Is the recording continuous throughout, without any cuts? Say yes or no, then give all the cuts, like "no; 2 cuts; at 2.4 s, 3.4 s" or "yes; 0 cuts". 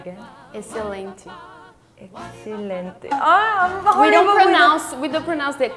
yes; 0 cuts